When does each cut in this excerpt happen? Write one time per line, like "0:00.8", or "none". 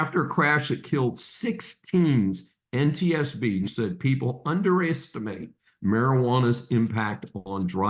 0:03.7